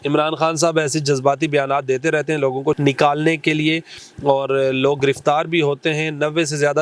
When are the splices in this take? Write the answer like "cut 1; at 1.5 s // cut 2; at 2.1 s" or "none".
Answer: cut 1; at 2.8 s